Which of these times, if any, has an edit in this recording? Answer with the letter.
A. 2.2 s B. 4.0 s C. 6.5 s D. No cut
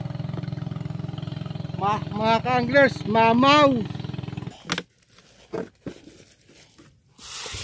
B